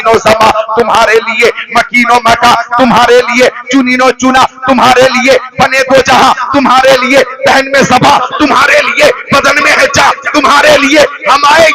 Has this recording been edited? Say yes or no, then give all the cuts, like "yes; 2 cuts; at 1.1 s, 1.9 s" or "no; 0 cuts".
no; 0 cuts